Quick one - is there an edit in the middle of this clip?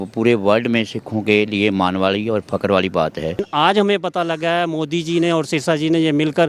yes; 1 cut; at 3.4 s

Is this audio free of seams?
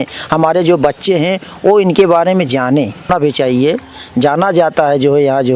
no; 1 cut; at 3.1 s

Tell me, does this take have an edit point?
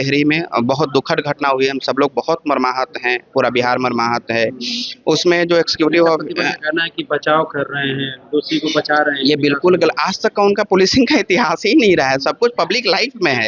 no; 0 cuts

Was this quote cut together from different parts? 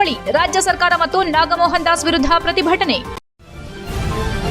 yes; 1 cut; at 3.1 s

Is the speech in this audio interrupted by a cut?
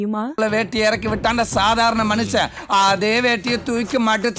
no; 0 cuts

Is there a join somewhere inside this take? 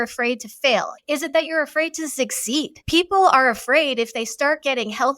yes; 2 cuts; at 0.9 s, 2.8 s

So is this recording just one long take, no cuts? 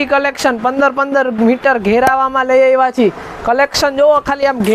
yes; 0 cuts

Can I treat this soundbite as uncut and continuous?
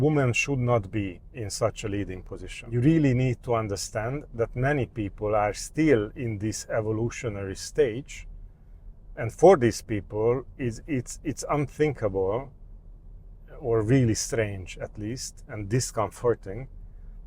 no; 1 cut; at 2.7 s

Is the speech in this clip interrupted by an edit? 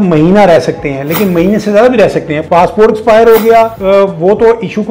yes; 2 cuts; at 2.4 s, 3.8 s

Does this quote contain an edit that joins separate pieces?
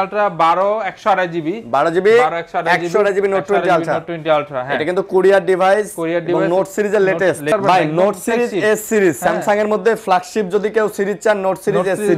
yes; 1 cut; at 7.4 s

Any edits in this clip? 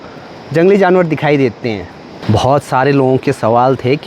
yes; 1 cut; at 2.1 s

